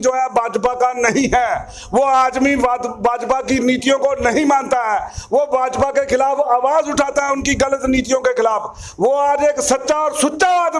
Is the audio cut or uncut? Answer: uncut